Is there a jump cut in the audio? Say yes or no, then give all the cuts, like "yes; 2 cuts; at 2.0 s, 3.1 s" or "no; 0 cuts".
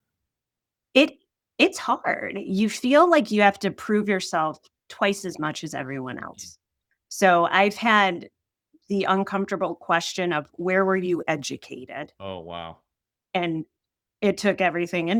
no; 0 cuts